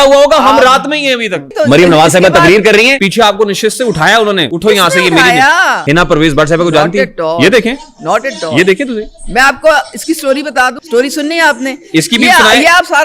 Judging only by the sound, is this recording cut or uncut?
cut